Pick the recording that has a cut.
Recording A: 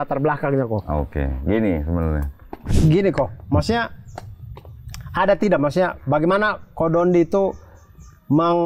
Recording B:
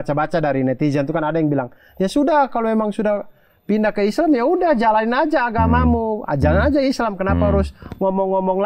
A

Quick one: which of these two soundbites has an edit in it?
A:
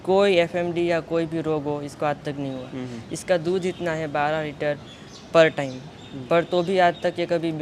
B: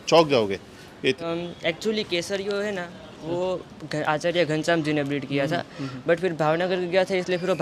B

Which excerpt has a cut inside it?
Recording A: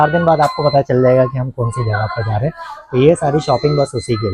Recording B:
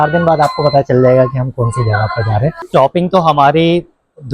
B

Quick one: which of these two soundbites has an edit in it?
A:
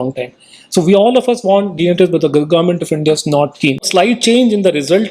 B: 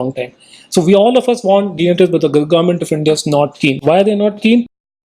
A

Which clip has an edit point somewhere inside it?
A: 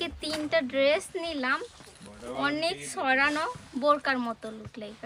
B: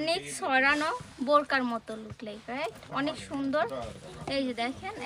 B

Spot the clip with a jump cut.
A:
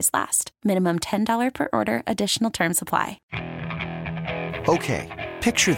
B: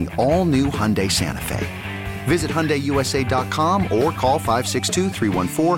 A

